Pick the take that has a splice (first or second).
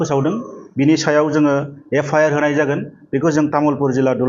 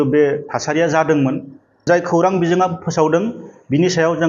second